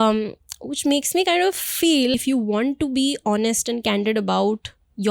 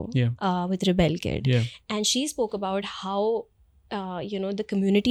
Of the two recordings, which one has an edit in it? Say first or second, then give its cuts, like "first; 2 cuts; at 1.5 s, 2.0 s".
first; 1 cut; at 2.2 s